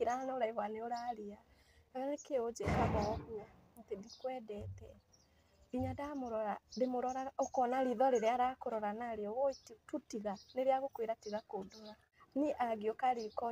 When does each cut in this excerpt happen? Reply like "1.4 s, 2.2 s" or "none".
12.4 s

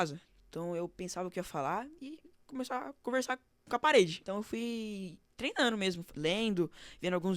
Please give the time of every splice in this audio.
4.2 s

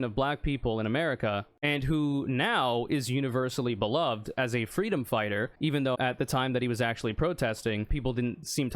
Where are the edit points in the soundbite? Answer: none

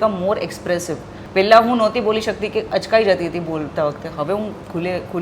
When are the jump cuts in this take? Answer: 1.1 s

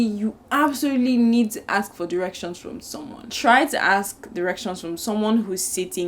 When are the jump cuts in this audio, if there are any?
3.3 s

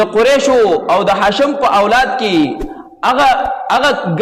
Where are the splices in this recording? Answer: none

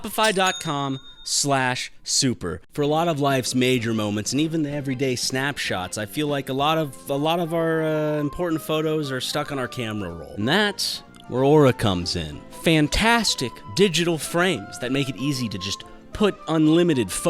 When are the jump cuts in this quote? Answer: 2.6 s, 10.3 s

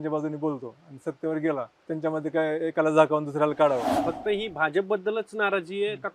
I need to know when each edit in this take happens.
1.8 s, 3.9 s

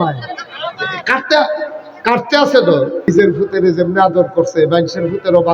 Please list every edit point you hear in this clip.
3.1 s

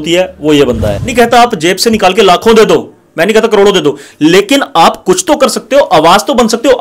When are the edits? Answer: 1.0 s

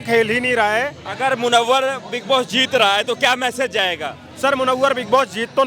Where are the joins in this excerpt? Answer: 1.0 s

